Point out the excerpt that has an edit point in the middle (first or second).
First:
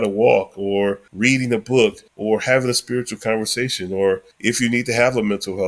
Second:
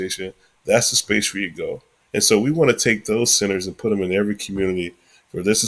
first